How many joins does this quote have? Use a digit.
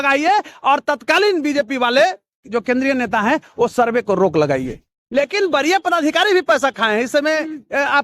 1